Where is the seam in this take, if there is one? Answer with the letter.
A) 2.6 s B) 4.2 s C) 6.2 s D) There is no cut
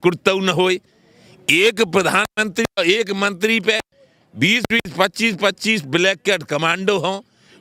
D